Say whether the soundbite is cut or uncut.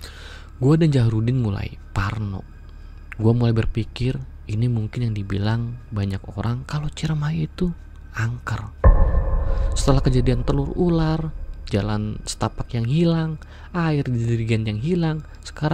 uncut